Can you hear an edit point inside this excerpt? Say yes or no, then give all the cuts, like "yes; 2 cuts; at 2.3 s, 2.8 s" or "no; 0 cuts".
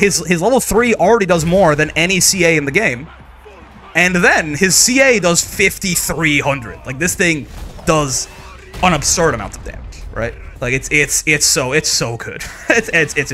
no; 0 cuts